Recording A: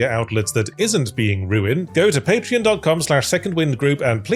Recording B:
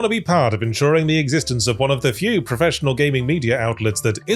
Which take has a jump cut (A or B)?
A